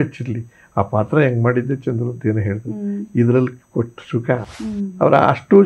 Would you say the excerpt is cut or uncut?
cut